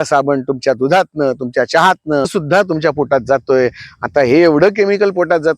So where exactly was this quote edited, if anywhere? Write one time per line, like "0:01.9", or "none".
0:02.3